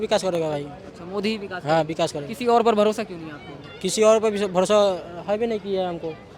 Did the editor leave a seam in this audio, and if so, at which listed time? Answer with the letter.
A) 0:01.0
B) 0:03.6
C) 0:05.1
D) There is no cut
D